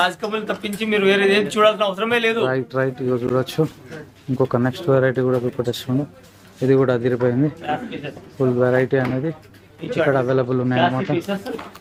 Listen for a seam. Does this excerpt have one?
no; 0 cuts

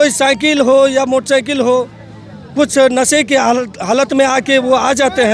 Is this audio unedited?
yes; 0 cuts

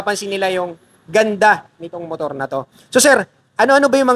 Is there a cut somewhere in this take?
no; 0 cuts

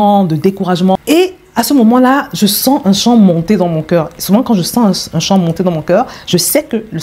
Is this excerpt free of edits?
no; 1 cut; at 0.9 s

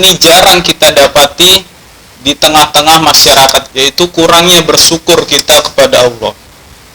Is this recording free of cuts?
no; 1 cut; at 3.7 s

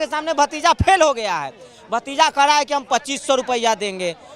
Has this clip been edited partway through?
no; 0 cuts

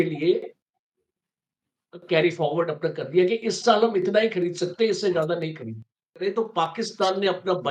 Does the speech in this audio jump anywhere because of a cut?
yes; 1 cut; at 6.2 s

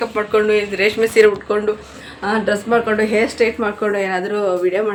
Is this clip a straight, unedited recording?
yes; 0 cuts

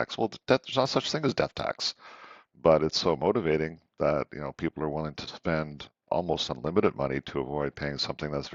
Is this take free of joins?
yes; 0 cuts

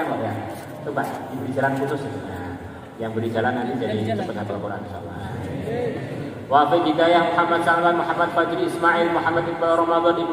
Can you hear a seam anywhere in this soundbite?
no; 0 cuts

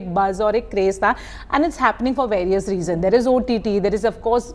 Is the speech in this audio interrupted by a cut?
no; 0 cuts

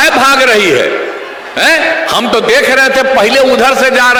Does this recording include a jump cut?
no; 0 cuts

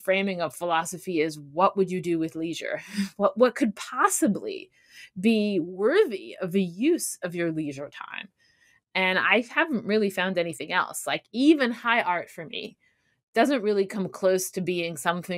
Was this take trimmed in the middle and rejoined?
no; 0 cuts

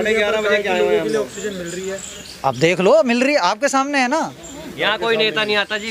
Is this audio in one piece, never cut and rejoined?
yes; 0 cuts

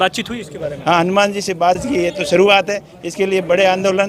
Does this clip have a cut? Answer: yes; 1 cut; at 1.8 s

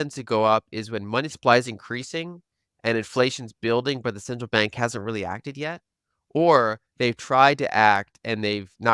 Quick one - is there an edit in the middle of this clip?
no; 0 cuts

